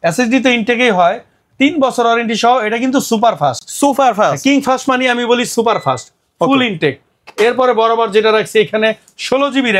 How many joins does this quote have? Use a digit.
0